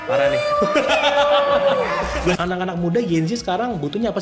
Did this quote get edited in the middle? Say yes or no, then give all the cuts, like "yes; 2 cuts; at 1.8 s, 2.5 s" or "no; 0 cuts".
yes; 1 cut; at 2.3 s